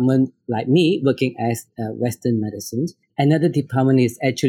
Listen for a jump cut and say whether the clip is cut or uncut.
cut